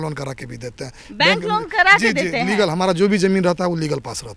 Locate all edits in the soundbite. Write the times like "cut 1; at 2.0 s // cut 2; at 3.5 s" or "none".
none